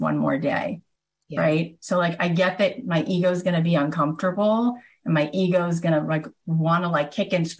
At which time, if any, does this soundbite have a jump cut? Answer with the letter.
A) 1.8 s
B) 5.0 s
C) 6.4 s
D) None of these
D